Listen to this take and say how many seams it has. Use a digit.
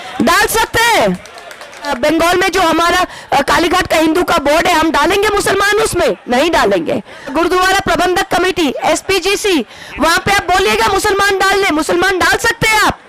2